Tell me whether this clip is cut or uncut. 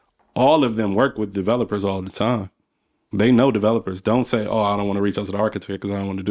uncut